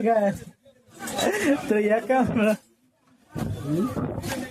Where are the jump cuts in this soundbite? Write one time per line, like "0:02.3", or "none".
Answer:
none